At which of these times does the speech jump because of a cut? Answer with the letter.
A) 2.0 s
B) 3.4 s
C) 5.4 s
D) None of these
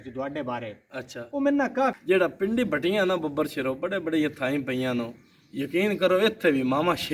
A